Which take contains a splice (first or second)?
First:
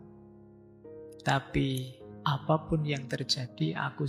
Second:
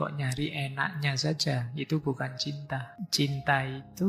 second